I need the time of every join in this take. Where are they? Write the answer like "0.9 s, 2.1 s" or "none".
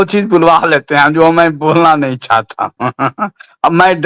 none